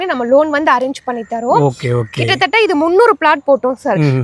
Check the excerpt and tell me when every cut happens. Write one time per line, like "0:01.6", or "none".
none